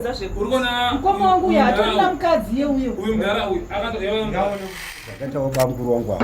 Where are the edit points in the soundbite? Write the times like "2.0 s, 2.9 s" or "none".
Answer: 4.9 s